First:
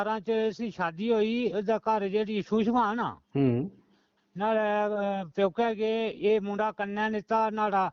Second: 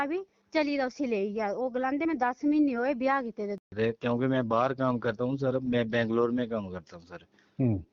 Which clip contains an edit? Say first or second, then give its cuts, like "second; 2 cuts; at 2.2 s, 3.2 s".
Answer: second; 1 cut; at 3.6 s